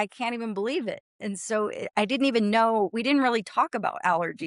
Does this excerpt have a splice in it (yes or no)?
no